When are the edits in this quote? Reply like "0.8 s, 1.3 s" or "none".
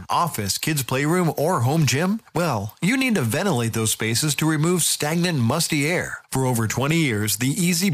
none